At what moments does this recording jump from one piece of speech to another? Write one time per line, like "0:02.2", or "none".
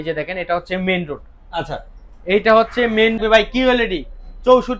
0:03.2